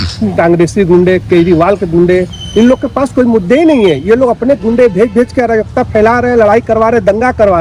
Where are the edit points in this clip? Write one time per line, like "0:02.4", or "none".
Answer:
none